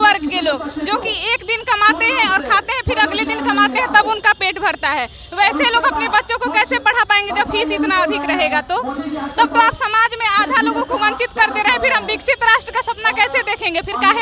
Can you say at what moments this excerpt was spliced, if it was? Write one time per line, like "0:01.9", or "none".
none